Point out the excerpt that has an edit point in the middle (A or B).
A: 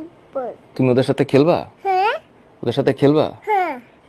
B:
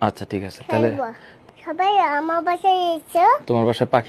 B